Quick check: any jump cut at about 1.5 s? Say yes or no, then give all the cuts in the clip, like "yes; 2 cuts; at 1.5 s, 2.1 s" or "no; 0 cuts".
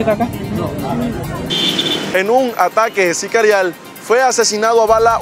yes; 1 cut; at 1.5 s